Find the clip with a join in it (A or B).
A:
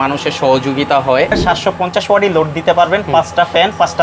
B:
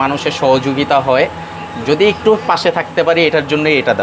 A